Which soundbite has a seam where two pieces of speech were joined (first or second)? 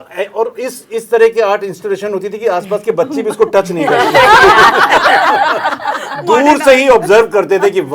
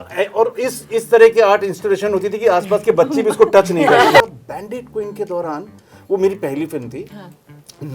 second